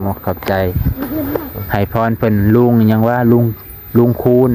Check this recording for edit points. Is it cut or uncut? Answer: uncut